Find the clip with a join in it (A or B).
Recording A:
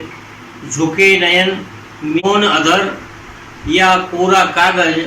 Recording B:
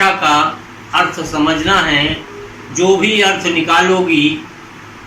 A